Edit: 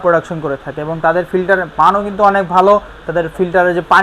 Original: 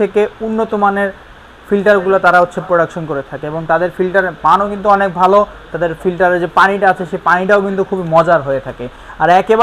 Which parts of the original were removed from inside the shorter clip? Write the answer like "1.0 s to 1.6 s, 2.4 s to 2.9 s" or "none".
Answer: none